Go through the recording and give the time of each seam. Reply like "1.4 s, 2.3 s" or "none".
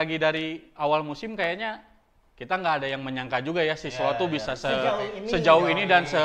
none